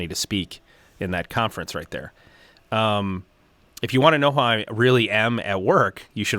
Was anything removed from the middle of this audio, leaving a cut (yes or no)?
no